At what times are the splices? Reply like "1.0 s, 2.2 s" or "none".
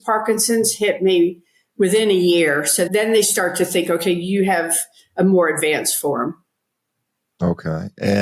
none